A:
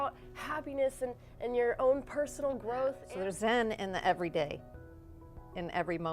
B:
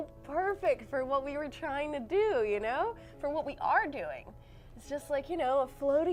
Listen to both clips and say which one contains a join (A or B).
A